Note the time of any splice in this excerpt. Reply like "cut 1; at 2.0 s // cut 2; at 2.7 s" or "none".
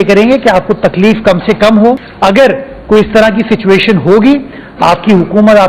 cut 1; at 2.1 s